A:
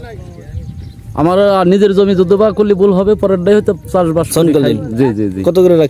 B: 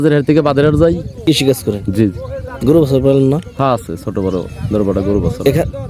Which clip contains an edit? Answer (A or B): B